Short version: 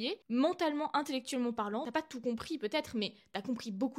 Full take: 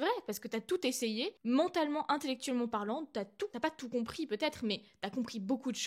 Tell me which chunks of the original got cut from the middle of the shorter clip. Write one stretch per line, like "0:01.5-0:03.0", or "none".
0:03.0-0:03.5